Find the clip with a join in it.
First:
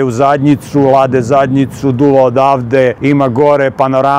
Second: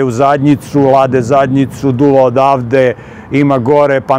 first; 1 cut; at 3.0 s

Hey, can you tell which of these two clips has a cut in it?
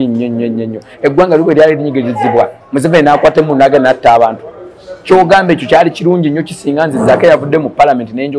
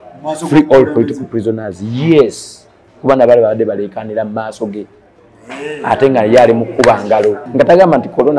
second; 1 cut; at 7.4 s

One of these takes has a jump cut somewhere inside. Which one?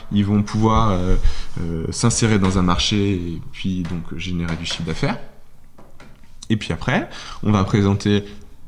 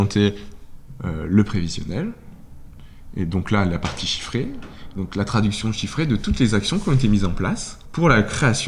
second; 1 cut; at 7.8 s

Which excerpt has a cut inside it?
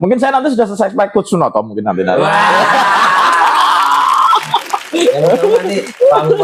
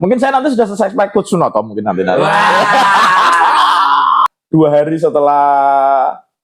second; 1 cut; at 4.3 s

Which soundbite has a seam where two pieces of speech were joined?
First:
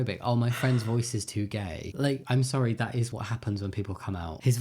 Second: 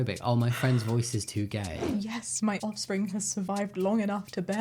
second; 1 cut; at 1.9 s

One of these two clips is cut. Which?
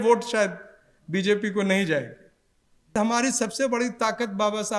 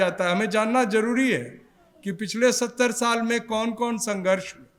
first; 1 cut; at 2.9 s

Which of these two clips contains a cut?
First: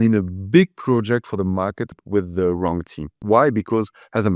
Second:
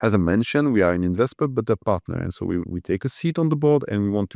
first; 2 cuts; at 2.0 s, 3.2 s

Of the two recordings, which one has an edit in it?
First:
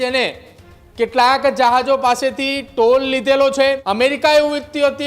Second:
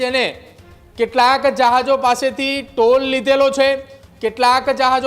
first; 1 cut; at 3.8 s

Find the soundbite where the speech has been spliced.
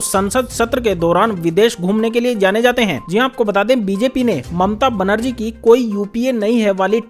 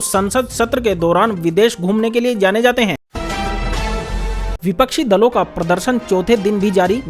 second; 2 cuts; at 3.0 s, 4.1 s

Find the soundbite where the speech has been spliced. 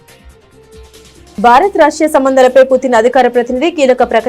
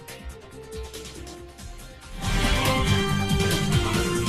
second; 1 cut; at 1.3 s

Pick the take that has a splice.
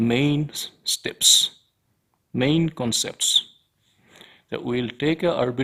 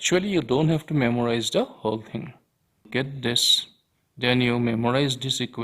second; 1 cut; at 2.9 s

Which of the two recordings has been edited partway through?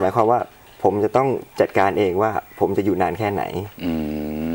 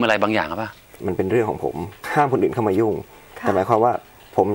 second; 2 cuts; at 1.0 s, 2.0 s

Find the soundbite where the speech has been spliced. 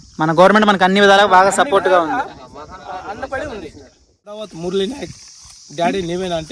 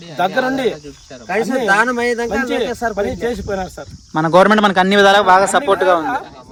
first; 1 cut; at 4.4 s

